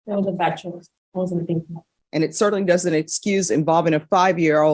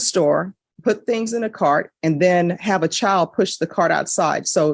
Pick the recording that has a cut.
first; 2 cuts; at 0.9 s, 1.9 s

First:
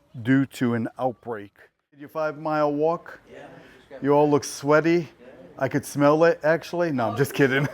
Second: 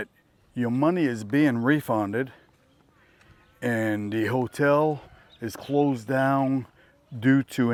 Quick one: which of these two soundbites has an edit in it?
first; 1 cut; at 2.1 s

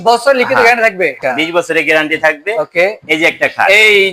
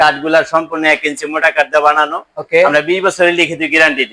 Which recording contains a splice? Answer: first; 1 cut; at 1.1 s

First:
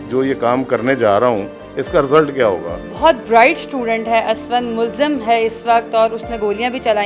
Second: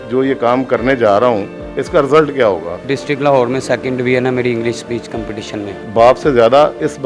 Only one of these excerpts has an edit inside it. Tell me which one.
second; 2 cuts; at 2.8 s, 5.8 s

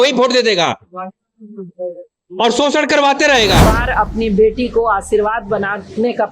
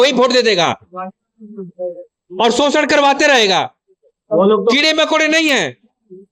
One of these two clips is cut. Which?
first; 1 cut; at 3.6 s

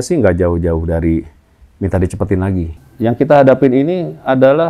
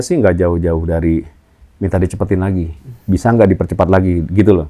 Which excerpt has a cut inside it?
first; 1 cut; at 2.8 s

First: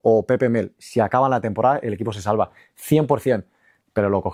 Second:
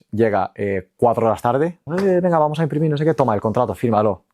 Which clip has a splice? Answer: second; 1 cut; at 1.9 s

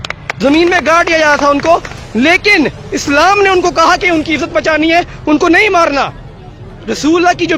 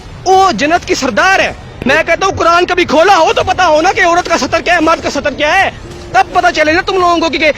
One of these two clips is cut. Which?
second; 1 cut; at 1.7 s

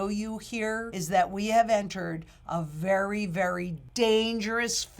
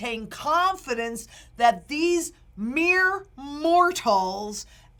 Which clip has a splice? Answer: first; 2 cuts; at 0.9 s, 3.8 s

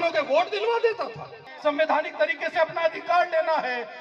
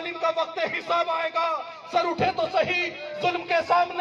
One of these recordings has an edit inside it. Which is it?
first; 1 cut; at 1.4 s

